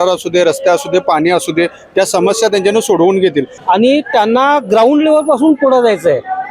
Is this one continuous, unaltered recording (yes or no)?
no